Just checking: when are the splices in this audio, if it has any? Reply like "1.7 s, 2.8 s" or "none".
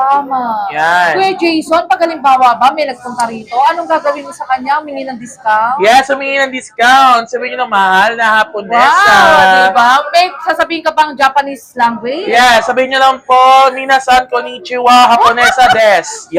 none